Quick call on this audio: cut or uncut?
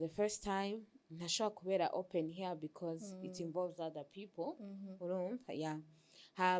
uncut